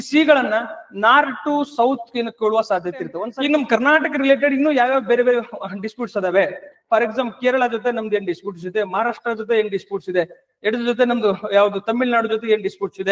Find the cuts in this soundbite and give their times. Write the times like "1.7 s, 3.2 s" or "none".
3.2 s